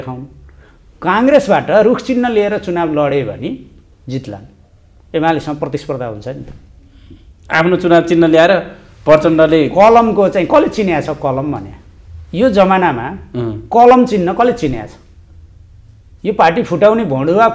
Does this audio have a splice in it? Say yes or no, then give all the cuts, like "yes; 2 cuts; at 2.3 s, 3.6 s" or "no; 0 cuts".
no; 0 cuts